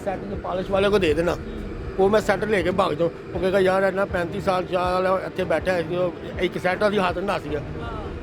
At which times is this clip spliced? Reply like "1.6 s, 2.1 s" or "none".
none